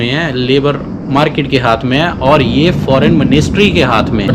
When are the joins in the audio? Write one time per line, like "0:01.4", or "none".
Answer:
none